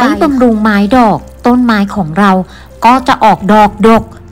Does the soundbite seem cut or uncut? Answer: uncut